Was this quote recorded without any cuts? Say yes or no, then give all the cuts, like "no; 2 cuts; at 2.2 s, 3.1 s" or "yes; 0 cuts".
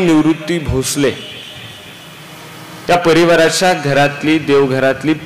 yes; 0 cuts